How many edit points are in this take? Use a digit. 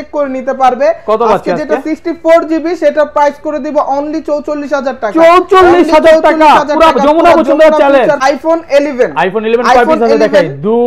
1